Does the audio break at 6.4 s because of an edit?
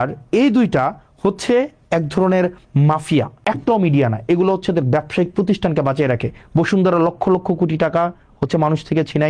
no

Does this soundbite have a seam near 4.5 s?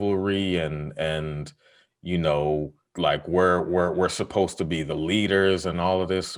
no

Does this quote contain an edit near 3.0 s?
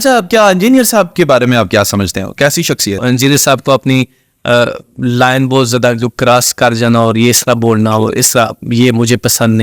yes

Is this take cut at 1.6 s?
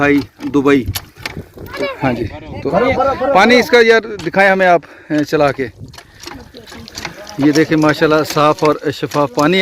yes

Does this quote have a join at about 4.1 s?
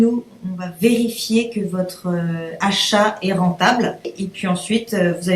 yes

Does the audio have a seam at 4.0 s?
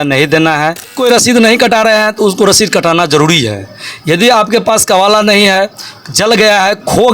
no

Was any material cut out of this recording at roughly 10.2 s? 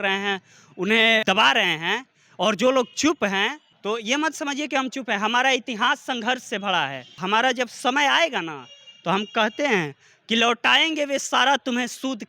no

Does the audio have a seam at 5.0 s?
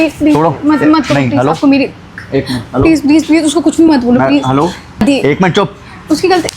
yes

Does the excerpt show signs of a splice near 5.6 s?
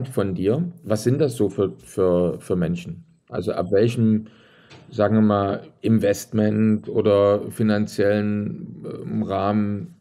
no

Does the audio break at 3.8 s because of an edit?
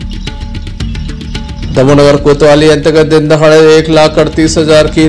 no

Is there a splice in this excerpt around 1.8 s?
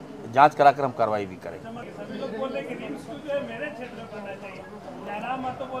yes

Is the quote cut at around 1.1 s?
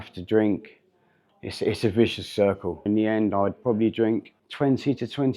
no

